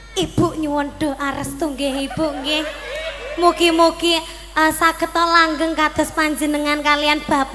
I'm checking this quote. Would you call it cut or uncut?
uncut